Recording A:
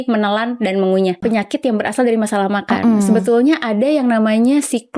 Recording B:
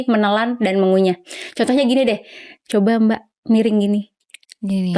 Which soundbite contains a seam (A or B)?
A